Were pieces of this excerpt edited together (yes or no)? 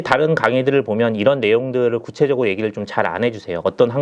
no